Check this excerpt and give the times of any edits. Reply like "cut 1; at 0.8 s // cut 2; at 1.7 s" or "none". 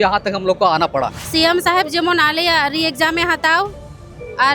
cut 1; at 1.2 s